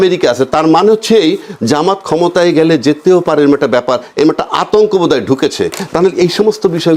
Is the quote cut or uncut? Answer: uncut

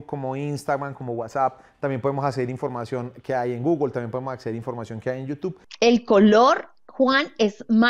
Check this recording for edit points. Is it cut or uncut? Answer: cut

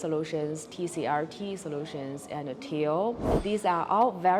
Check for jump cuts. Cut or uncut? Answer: cut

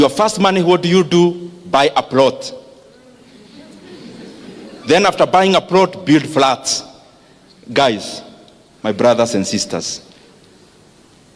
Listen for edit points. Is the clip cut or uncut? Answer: uncut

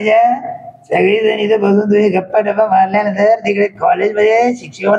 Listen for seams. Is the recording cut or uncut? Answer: uncut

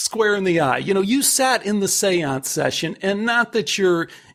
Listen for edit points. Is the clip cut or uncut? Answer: uncut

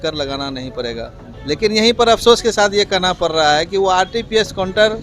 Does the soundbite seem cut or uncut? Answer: cut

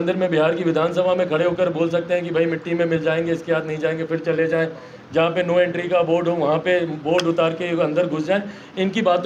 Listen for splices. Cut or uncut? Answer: uncut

